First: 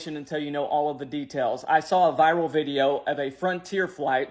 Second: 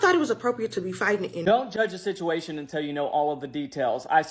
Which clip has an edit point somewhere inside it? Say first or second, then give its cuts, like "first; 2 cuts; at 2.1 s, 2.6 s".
second; 1 cut; at 1.4 s